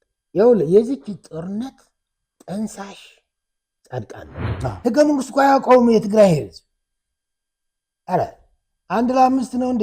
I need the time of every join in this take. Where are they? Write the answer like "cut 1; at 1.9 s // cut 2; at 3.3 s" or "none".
cut 1; at 4.4 s